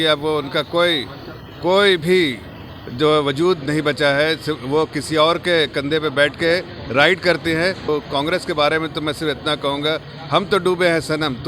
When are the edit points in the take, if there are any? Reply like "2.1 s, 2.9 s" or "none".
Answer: 7.9 s